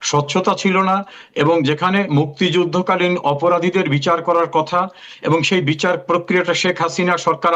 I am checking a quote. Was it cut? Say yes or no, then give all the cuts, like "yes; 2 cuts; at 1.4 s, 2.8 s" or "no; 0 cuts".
no; 0 cuts